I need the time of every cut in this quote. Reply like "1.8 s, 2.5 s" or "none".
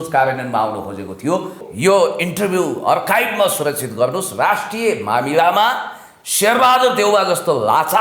1.6 s